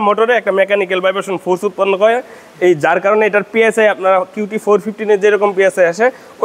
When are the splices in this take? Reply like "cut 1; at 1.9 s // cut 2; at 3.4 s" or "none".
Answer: none